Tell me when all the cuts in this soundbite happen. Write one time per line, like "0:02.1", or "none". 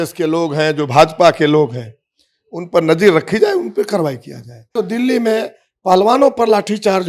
0:04.7